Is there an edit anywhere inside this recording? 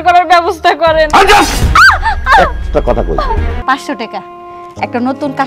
yes; 1 cut; at 3.5 s

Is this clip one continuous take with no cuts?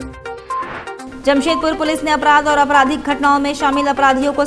yes; 0 cuts

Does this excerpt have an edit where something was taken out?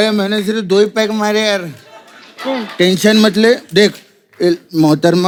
no; 0 cuts

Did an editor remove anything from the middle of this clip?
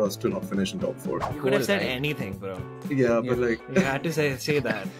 yes; 1 cut; at 1.3 s

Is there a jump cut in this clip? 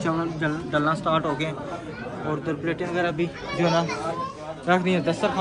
no; 0 cuts

